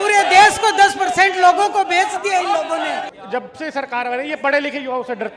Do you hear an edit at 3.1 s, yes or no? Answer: yes